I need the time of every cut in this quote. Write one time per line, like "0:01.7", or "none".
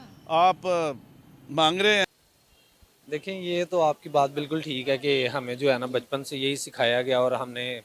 0:02.1